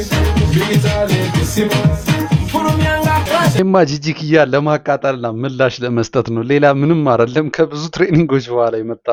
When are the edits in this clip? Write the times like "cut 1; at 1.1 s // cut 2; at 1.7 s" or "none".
none

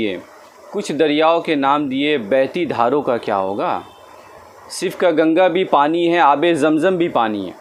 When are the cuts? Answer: none

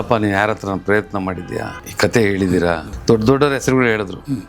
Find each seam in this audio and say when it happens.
cut 1; at 1.8 s // cut 2; at 2.9 s

